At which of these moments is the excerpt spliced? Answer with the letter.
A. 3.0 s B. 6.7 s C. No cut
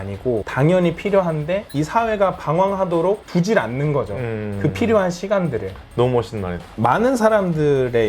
B